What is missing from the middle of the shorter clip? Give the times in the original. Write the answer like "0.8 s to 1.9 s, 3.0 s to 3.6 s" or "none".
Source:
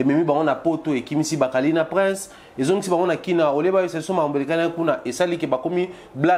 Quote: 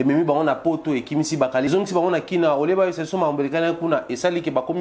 1.7 s to 2.6 s